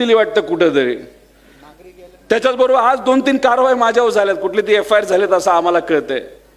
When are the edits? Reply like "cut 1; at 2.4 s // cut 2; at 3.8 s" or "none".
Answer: none

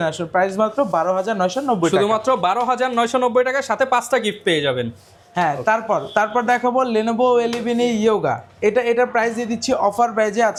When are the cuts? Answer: none

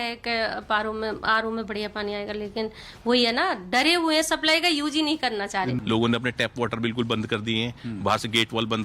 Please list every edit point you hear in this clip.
cut 1; at 5.8 s

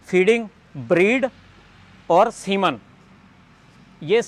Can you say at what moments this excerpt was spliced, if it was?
none

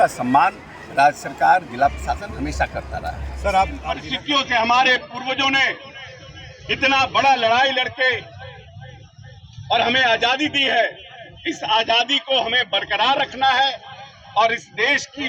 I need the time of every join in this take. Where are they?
cut 1; at 4.0 s

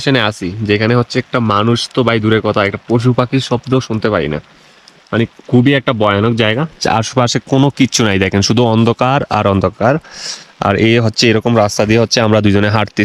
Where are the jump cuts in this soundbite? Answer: none

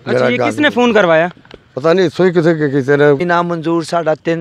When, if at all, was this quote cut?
cut 1; at 3.2 s

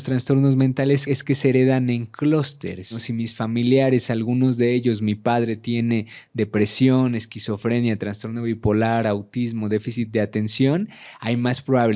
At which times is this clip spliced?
cut 1; at 1.0 s // cut 2; at 3.1 s

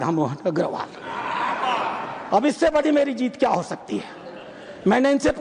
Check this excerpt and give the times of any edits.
none

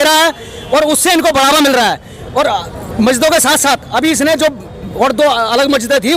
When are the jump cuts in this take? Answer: none

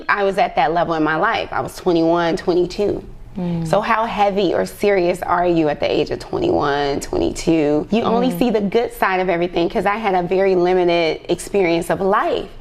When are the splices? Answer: cut 1; at 7.9 s

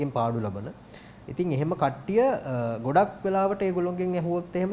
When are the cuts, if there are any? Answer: none

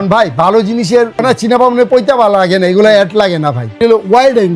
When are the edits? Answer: cut 1; at 1.2 s // cut 2; at 3.8 s

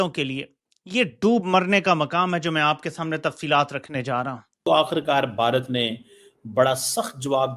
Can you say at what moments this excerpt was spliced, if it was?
cut 1; at 4.6 s

